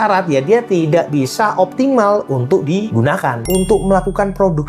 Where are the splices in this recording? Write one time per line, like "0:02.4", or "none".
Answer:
0:03.5